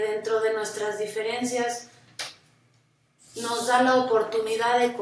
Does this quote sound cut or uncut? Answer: uncut